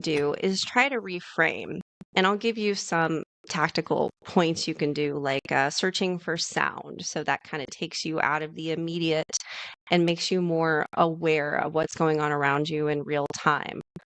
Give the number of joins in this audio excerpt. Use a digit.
0